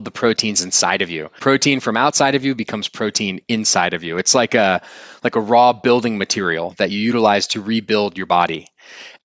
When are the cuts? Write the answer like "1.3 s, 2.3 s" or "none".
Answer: none